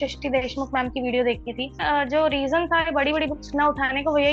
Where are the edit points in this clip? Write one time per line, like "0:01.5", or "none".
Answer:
0:01.8